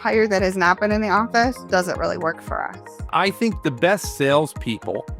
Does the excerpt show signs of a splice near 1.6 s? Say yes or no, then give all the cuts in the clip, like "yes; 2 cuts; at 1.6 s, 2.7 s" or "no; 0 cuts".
no; 1 cut; at 3.0 s